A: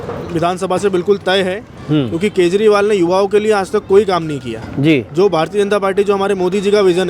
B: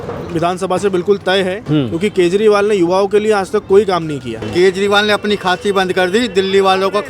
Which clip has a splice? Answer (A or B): B